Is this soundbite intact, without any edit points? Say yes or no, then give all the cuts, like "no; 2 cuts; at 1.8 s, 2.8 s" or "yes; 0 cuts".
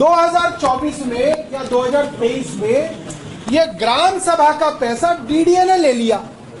yes; 0 cuts